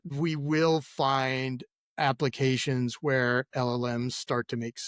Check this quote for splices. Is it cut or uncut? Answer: uncut